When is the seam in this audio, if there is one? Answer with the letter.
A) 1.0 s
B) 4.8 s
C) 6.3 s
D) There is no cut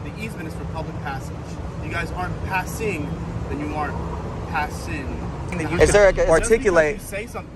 C